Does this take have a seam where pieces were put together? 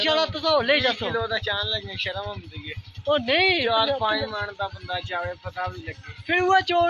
no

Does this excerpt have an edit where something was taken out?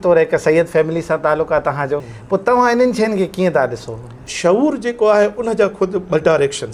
yes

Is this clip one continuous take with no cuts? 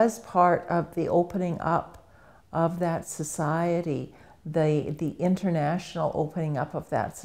yes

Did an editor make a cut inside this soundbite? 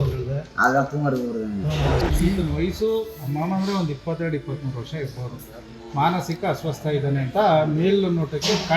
yes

